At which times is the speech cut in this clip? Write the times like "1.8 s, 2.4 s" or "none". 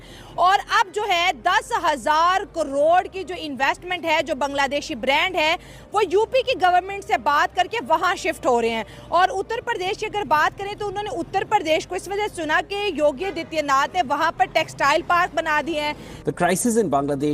16.1 s